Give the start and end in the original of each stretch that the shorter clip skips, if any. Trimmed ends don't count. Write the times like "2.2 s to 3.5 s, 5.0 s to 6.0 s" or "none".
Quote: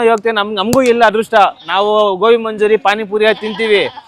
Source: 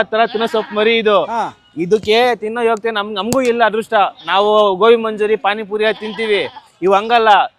none